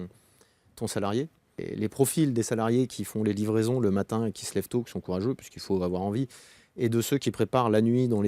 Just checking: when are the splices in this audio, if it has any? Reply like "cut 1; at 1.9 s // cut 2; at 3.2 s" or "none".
cut 1; at 1.6 s

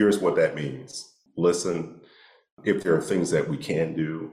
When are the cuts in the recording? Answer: cut 1; at 1.2 s

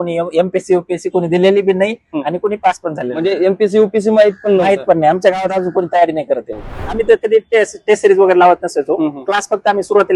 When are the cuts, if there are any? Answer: cut 1; at 6.8 s

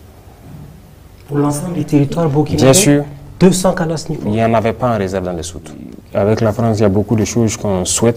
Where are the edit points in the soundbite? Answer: cut 1; at 5.9 s

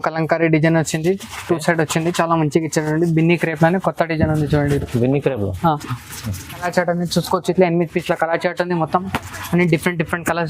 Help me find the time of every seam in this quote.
cut 1; at 6.7 s

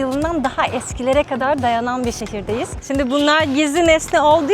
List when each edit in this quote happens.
cut 1; at 2.8 s

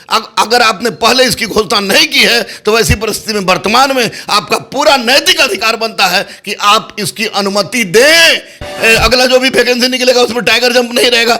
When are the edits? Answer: cut 1; at 8.6 s

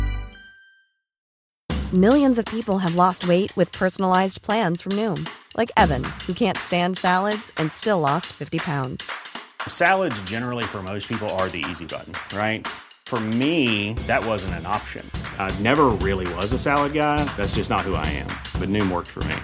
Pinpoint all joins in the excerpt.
cut 1; at 1.3 s

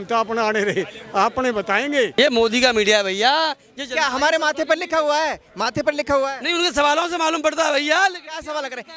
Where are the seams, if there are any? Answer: cut 1; at 2.1 s

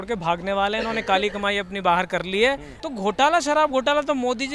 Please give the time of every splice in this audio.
cut 1; at 2.7 s

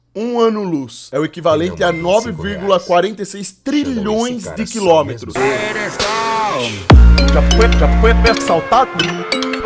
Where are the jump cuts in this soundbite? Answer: cut 1; at 1.0 s // cut 2; at 5.3 s

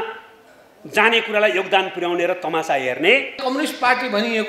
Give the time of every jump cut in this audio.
cut 1; at 3.4 s

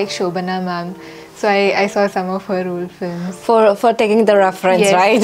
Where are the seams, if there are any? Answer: none

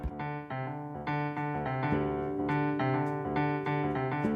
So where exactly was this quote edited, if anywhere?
none

